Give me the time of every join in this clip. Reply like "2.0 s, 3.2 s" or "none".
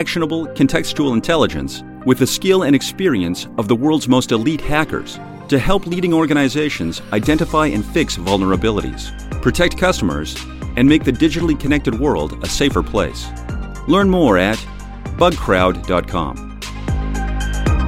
16.6 s